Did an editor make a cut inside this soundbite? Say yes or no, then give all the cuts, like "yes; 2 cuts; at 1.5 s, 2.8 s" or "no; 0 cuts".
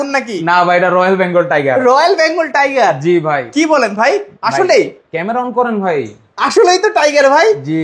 no; 0 cuts